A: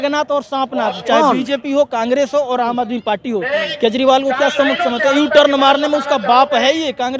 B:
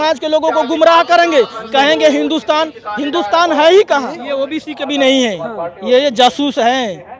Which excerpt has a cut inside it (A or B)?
B